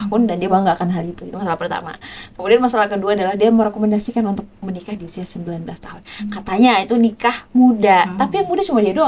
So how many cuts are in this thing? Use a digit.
0